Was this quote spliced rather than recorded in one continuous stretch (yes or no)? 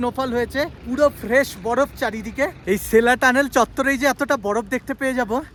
no